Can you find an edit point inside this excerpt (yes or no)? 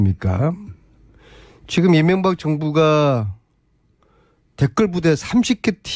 yes